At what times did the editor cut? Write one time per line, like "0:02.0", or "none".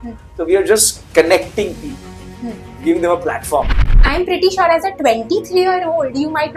0:04.0